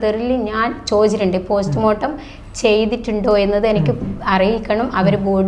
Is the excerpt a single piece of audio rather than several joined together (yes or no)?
yes